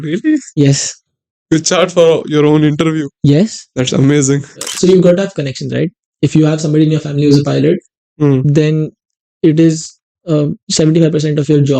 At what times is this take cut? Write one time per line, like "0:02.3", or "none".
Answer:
0:04.7